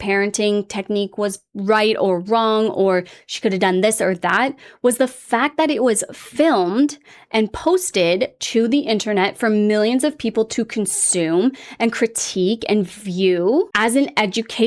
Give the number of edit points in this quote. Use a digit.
1